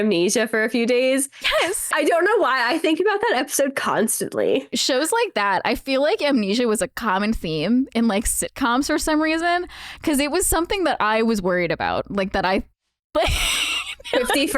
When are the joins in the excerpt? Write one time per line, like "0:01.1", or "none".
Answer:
0:01.9
0:04.7